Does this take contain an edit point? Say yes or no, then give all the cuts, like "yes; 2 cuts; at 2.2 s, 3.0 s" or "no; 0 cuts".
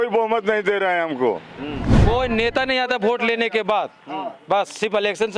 yes; 1 cut; at 1.9 s